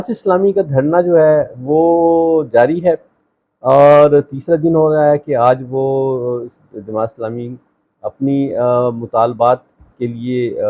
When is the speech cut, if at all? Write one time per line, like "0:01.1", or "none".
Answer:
none